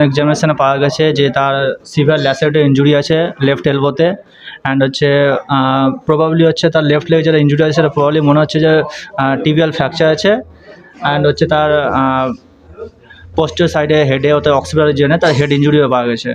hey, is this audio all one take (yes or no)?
yes